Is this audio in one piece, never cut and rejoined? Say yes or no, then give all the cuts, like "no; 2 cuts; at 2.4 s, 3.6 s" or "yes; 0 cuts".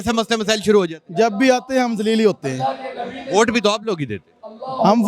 yes; 0 cuts